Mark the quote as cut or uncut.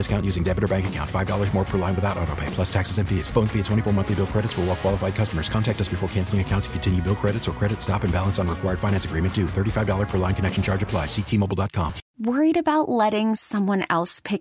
cut